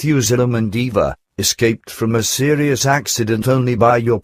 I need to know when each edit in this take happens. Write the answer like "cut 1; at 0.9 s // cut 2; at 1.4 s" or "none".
none